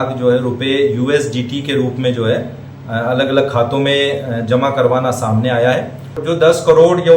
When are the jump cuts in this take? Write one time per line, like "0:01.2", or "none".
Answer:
0:06.2